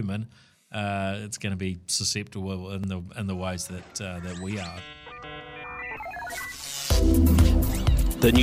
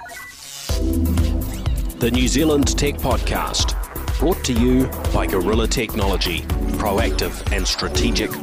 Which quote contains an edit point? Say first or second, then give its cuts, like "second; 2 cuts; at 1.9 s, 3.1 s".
first; 2 cuts; at 2.8 s, 4.8 s